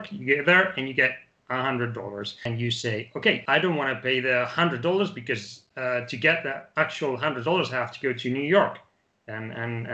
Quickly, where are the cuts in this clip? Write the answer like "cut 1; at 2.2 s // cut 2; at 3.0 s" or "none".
cut 1; at 2.5 s // cut 2; at 3.4 s